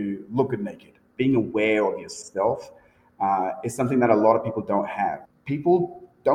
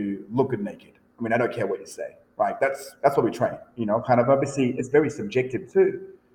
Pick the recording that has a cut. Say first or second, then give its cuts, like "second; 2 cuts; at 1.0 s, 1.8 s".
first; 2 cuts; at 1.1 s, 5.2 s